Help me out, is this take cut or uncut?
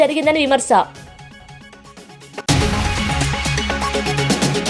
cut